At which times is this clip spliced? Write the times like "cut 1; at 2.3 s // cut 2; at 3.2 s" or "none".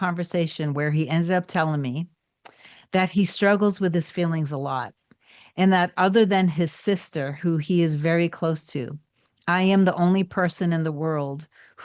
none

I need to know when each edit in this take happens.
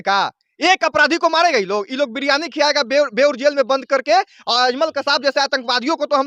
none

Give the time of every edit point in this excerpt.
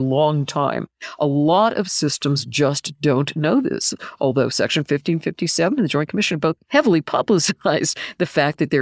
cut 1; at 6.6 s

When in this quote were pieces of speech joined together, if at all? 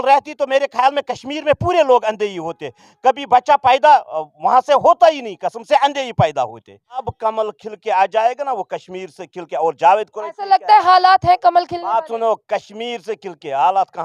cut 1; at 7.1 s

